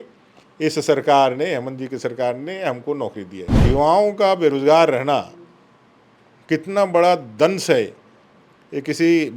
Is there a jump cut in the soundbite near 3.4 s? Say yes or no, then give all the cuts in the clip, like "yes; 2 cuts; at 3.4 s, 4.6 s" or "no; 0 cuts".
yes; 1 cut; at 3.4 s